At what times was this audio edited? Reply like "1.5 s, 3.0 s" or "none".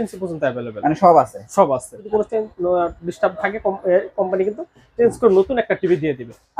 2.1 s